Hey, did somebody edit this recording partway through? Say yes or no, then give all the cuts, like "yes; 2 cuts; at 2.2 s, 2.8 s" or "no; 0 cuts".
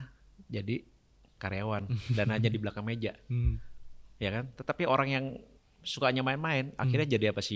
no; 0 cuts